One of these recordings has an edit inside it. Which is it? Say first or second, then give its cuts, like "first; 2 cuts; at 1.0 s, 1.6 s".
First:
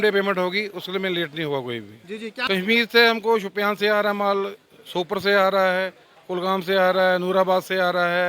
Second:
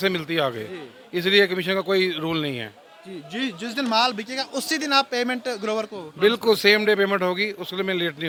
first; 1 cut; at 2.4 s